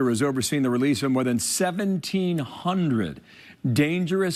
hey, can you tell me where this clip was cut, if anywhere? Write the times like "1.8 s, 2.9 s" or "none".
none